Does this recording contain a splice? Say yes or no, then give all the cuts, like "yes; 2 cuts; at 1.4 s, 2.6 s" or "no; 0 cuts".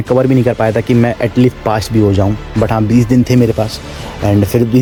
no; 0 cuts